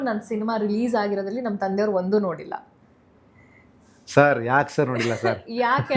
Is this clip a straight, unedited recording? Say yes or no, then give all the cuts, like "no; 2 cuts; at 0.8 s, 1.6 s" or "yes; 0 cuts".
yes; 0 cuts